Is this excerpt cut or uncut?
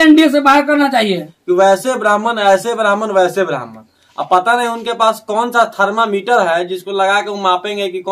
cut